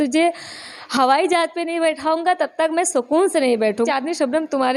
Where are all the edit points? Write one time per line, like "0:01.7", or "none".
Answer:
0:03.9